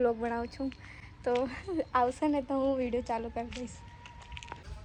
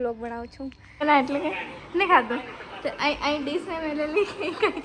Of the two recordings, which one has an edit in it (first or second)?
second